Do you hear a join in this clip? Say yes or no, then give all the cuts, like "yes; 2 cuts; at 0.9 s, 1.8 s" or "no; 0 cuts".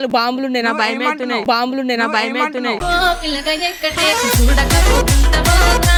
no; 0 cuts